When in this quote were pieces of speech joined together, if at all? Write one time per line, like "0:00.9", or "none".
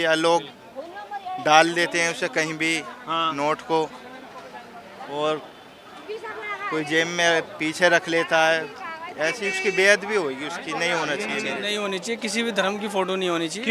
0:11.6